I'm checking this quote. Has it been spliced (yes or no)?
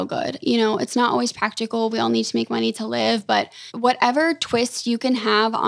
yes